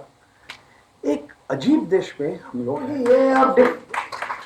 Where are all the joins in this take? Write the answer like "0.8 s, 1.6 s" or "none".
2.9 s